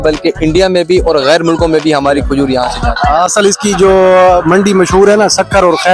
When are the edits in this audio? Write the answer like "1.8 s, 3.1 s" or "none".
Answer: none